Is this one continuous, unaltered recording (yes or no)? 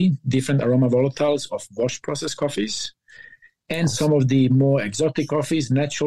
yes